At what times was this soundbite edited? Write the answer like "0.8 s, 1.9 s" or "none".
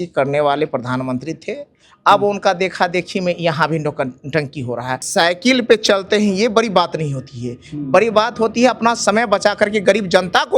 5.0 s